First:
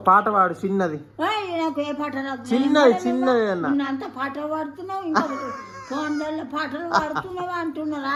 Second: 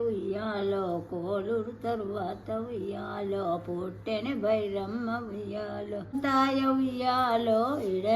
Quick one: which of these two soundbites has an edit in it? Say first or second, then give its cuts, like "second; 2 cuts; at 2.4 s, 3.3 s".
second; 1 cut; at 6.2 s